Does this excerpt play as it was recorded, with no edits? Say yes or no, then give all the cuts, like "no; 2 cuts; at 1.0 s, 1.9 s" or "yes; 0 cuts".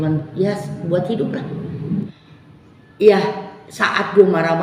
no; 1 cut; at 2.1 s